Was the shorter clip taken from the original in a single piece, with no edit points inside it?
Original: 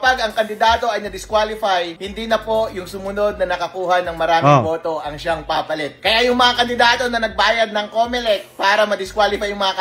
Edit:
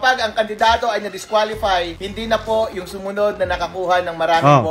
yes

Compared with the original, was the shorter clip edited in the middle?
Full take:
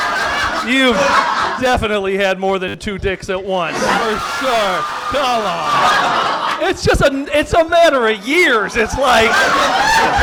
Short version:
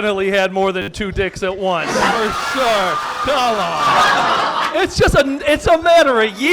no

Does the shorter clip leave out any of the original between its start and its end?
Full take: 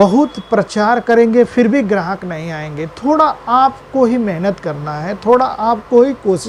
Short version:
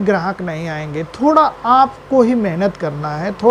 no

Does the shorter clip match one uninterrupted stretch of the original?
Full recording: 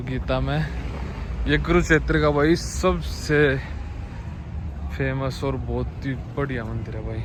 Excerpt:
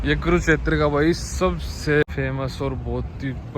no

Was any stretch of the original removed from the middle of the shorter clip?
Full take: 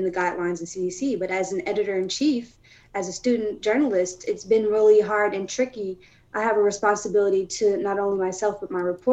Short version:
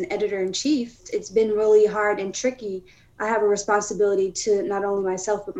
yes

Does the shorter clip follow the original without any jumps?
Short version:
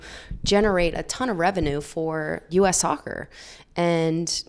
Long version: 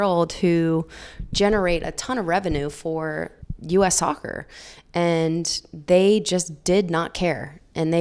no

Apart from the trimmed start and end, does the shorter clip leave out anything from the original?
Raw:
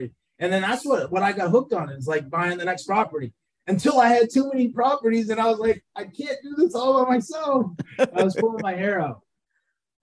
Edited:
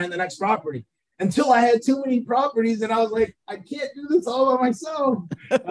no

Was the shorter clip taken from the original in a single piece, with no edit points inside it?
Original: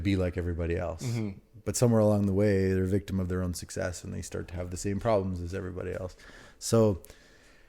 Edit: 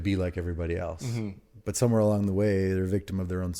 yes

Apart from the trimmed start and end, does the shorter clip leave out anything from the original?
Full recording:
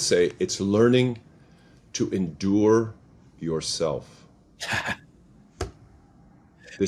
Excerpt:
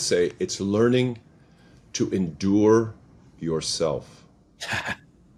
no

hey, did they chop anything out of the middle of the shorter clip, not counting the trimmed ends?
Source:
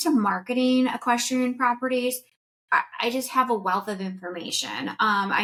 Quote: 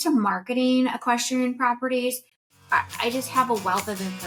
no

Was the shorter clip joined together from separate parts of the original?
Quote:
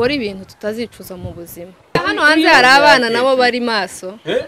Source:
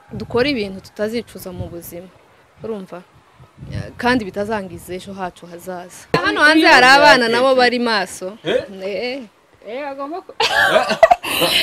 yes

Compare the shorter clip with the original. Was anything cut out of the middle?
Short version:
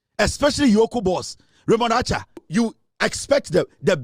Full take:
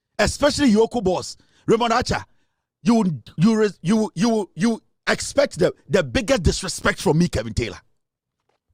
yes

